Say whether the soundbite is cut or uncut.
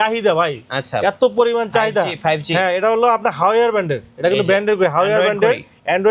uncut